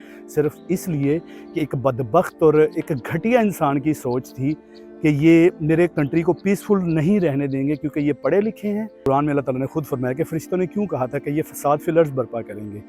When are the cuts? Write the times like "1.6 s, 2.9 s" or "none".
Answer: 9.0 s

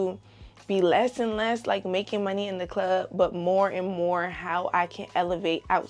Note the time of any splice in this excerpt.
none

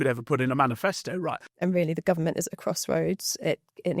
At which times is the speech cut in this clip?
1.5 s

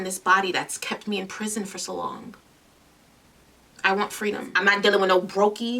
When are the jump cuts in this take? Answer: 4.5 s

